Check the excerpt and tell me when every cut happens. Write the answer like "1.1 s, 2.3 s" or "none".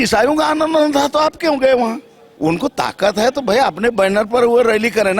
2.3 s